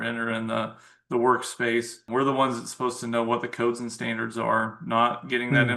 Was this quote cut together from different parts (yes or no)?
yes